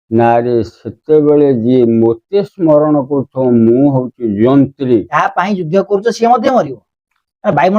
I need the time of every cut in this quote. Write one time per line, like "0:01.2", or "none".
0:05.1

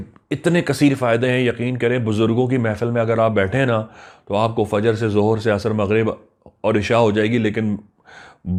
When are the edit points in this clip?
none

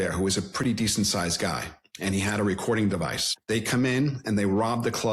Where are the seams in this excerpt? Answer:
0:03.3

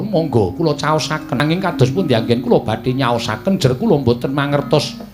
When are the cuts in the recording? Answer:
0:01.4

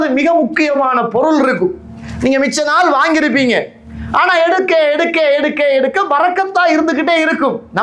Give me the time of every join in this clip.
none

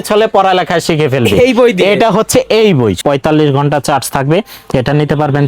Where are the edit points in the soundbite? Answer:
0:03.0

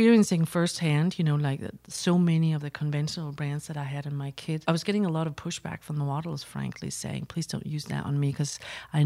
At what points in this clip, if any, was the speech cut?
0:04.6

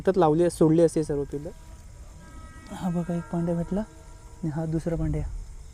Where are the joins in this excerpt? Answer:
0:01.3

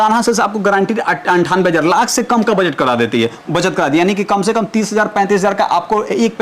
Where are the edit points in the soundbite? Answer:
none

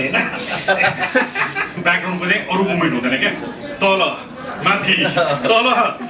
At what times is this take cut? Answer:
0:01.8

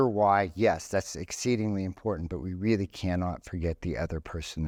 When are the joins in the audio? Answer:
none

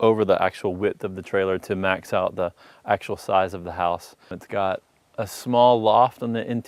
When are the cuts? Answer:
none

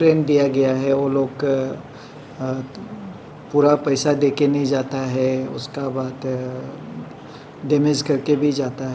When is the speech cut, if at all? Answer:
none

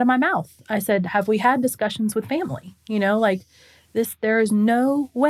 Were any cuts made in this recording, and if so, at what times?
none

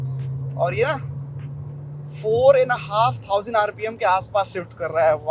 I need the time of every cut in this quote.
none

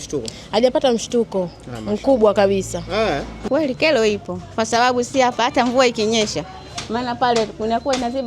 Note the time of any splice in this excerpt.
0:03.3

